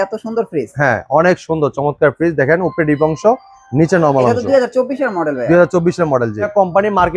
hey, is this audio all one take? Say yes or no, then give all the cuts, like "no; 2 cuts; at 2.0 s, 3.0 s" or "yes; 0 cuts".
yes; 0 cuts